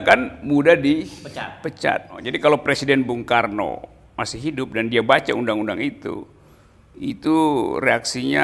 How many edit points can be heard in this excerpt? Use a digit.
1